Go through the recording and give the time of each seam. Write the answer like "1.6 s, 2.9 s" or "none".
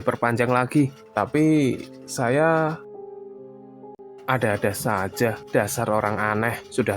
4.0 s